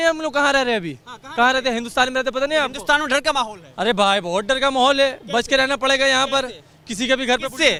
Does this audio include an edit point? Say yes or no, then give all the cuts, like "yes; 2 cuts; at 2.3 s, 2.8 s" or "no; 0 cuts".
no; 0 cuts